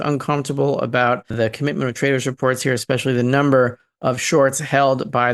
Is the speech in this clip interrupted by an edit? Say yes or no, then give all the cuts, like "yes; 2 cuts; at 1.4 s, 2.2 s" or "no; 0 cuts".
yes; 1 cut; at 1.3 s